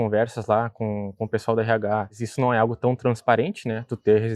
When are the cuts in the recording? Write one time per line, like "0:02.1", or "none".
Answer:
0:02.2